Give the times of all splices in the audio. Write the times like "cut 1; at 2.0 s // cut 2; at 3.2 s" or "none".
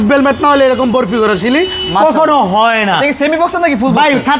none